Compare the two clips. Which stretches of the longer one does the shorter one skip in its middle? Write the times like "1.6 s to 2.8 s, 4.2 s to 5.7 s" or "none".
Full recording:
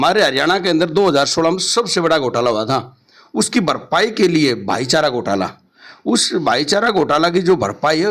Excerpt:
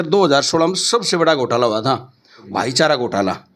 3.3 s to 4.6 s